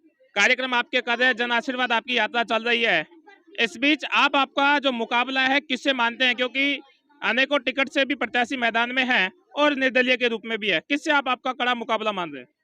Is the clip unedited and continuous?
yes; 0 cuts

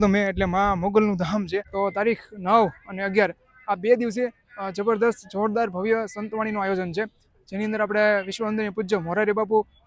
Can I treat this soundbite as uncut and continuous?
no; 1 cut; at 1.6 s

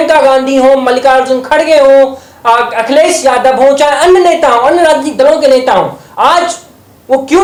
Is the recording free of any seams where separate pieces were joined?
yes; 0 cuts

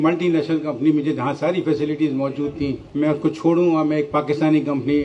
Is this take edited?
no; 0 cuts

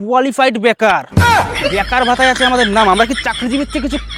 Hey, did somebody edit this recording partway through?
no; 0 cuts

